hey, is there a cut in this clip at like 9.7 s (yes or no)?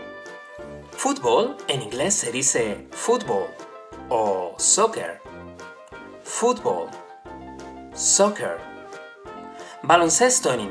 no